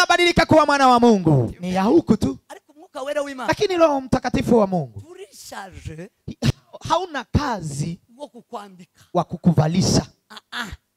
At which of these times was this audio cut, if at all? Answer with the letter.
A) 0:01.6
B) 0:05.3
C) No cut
A